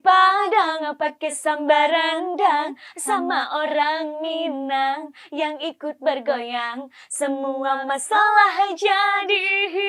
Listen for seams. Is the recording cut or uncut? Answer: uncut